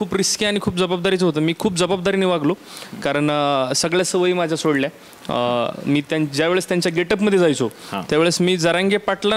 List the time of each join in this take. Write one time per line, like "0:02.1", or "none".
none